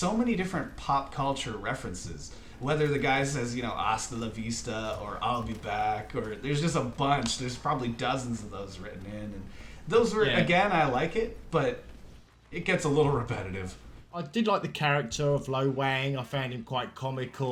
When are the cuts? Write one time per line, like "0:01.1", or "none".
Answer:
none